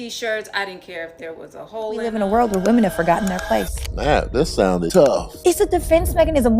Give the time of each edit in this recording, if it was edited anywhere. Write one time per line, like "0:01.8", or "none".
0:02.1